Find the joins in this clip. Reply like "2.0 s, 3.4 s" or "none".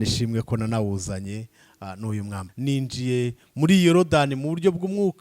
2.4 s